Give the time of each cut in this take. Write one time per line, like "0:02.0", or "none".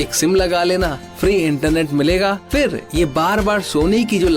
0:01.0
0:02.4